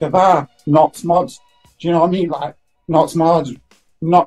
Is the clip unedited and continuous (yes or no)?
yes